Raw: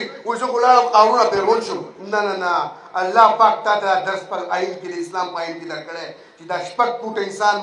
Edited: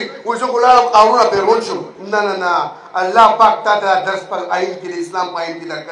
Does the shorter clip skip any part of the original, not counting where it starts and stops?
no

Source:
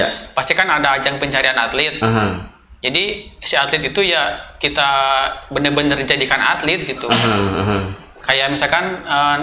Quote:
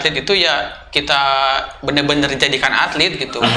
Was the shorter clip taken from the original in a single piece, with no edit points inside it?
yes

